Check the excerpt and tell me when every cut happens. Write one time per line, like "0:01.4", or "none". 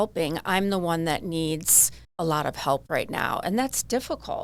none